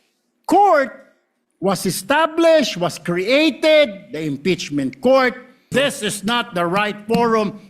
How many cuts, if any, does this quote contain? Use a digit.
1